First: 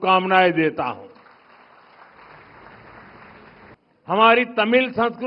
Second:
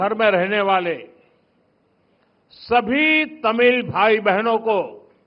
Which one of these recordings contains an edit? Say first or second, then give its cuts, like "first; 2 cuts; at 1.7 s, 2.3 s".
first; 1 cut; at 3.7 s